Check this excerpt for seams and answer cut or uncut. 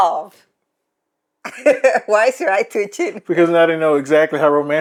uncut